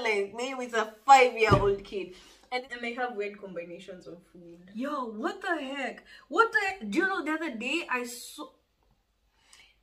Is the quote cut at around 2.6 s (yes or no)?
yes